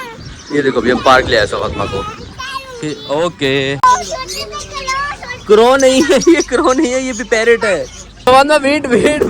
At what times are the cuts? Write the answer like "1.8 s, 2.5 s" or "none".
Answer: 3.8 s, 8.1 s